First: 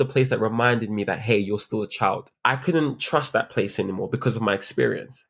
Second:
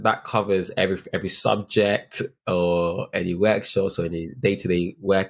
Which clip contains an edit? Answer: first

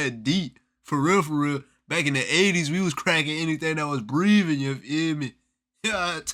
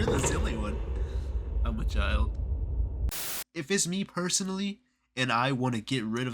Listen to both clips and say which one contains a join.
second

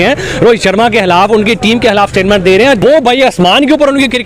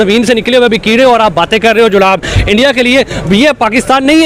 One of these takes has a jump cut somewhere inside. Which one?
first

